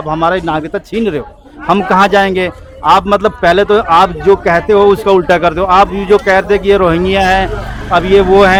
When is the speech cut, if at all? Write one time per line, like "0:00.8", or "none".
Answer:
none